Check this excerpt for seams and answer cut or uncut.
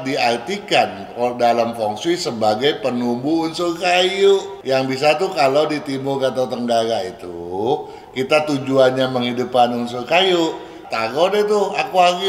cut